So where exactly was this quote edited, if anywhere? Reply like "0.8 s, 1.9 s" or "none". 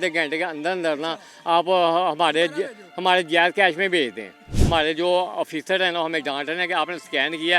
4.5 s